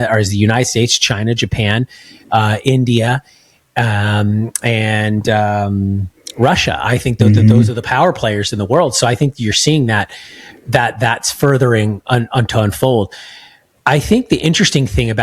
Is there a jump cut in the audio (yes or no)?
no